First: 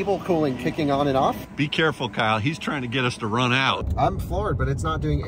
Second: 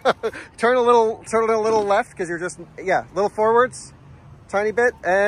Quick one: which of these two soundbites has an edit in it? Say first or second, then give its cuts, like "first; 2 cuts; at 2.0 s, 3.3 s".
first; 2 cuts; at 1.4 s, 3.8 s